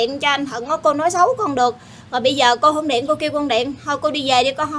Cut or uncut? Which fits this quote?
uncut